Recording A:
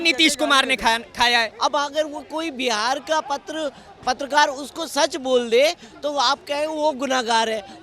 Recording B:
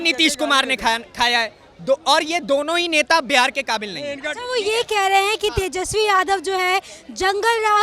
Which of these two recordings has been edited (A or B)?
A